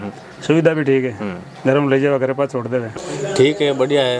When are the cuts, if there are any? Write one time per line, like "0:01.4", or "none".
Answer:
0:03.0